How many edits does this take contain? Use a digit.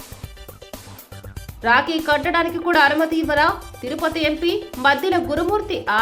0